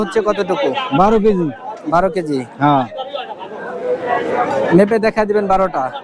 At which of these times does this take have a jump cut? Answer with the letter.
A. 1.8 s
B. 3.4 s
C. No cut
C